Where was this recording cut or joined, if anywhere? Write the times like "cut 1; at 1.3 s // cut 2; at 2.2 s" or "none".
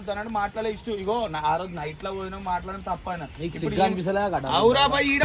none